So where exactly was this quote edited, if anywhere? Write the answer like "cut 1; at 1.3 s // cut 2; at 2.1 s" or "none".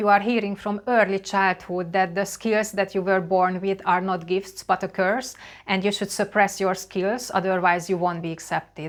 none

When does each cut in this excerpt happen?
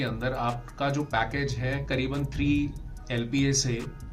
none

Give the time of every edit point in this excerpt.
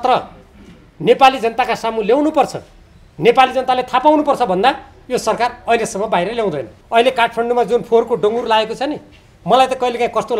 cut 1; at 6.7 s

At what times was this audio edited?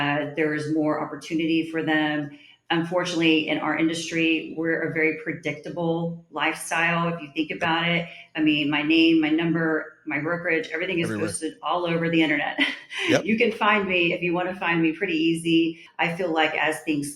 cut 1; at 15.9 s

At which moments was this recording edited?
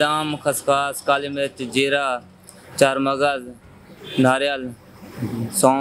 none

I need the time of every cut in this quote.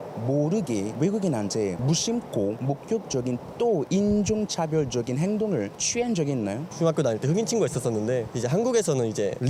none

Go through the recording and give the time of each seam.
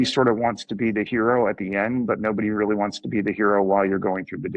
none

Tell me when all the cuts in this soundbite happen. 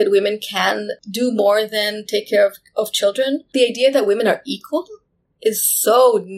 cut 1; at 3.5 s

